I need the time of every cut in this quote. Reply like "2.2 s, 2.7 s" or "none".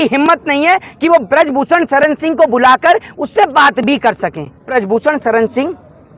4.7 s